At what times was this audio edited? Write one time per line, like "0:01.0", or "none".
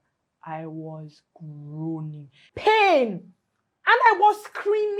0:02.4